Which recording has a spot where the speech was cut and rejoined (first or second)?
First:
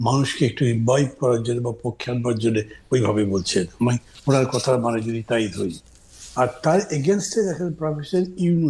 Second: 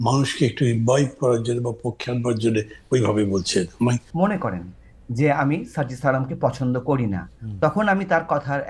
second